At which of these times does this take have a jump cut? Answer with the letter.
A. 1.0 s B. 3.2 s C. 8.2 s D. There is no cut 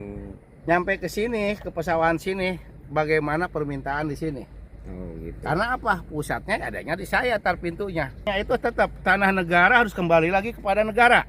C